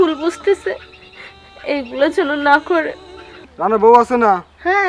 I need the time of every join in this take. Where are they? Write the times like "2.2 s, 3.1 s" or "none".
3.5 s